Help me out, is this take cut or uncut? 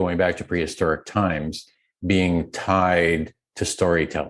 uncut